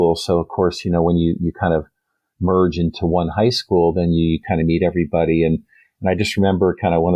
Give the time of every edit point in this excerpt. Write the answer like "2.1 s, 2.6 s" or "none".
none